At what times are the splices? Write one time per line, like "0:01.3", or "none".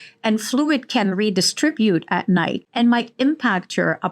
0:02.6